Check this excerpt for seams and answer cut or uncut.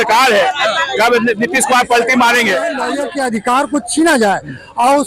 cut